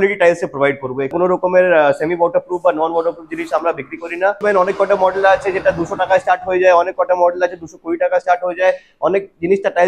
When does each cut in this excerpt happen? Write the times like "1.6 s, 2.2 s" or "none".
1.1 s, 4.4 s